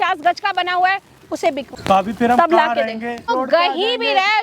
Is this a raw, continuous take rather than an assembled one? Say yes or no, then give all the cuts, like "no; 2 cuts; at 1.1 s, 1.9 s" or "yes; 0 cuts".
no; 2 cuts; at 1.6 s, 3.3 s